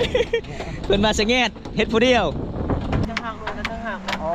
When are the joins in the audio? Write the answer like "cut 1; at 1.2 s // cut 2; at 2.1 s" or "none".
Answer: cut 1; at 3.0 s